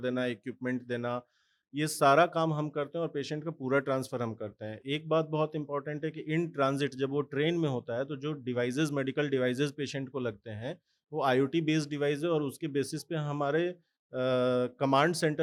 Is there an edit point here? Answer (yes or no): no